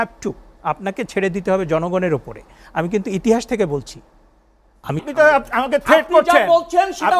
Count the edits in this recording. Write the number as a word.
one